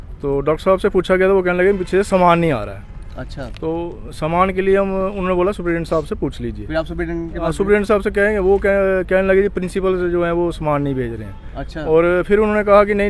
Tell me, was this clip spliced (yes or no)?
no